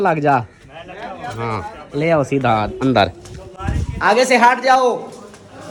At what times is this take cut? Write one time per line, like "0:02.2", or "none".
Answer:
none